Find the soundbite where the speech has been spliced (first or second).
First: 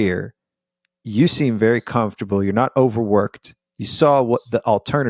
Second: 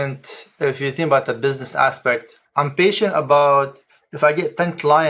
second